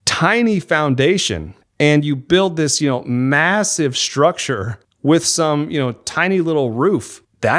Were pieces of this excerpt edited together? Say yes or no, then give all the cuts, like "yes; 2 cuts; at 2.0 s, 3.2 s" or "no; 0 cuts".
no; 0 cuts